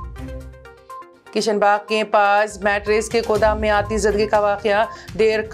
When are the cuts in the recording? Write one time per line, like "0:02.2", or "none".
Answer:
none